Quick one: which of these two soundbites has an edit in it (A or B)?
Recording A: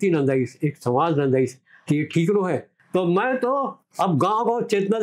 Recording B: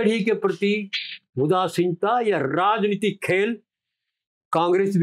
A